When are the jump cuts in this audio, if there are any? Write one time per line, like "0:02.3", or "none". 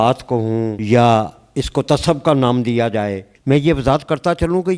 0:03.3